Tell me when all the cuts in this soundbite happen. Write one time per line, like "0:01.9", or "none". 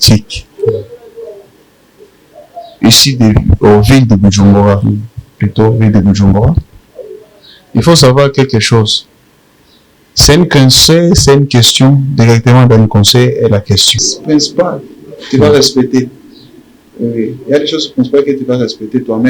0:14.1